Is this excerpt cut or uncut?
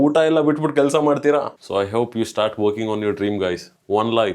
cut